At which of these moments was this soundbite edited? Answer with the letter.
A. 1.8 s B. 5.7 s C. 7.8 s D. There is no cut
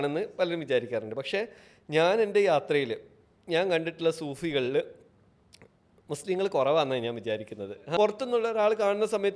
C